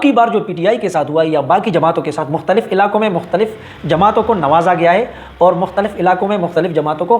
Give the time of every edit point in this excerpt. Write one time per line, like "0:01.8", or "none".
none